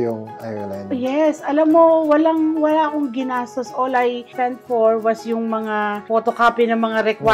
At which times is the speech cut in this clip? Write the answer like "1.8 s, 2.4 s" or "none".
none